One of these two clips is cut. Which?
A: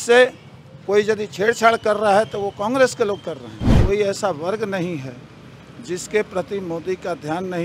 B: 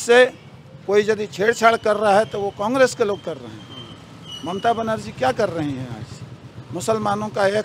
A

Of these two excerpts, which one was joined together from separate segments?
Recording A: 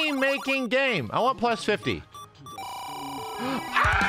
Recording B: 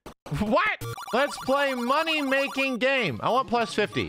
B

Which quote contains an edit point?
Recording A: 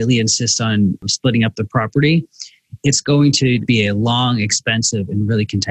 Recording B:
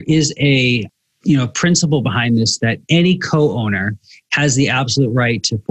A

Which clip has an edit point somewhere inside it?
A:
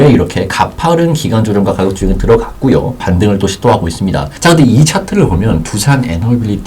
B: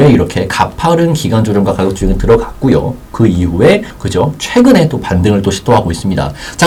A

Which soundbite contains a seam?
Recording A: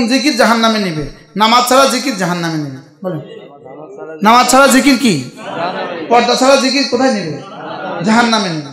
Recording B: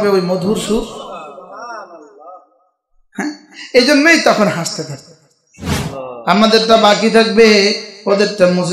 B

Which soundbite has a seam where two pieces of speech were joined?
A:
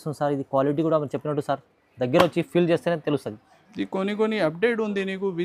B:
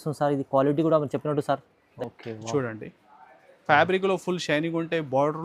B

